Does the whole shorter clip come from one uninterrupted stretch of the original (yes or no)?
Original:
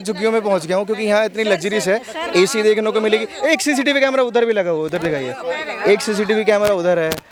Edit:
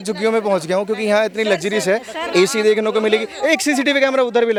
yes